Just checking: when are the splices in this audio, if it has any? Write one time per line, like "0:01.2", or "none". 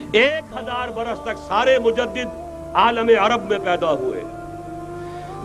none

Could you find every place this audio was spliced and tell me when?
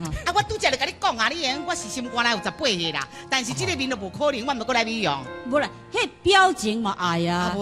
none

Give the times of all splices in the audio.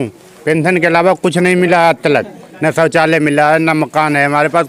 none

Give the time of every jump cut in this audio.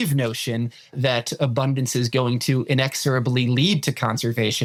none

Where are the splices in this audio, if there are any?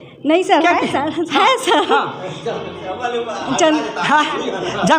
none

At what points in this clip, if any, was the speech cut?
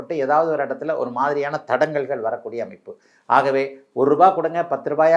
none

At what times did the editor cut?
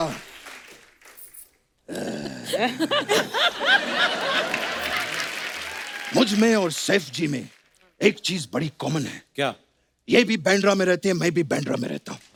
none

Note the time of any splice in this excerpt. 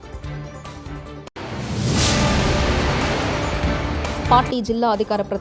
none

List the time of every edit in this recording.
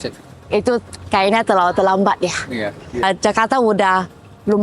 0:03.0

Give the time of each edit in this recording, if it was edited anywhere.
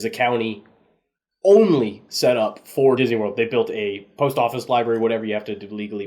0:03.0

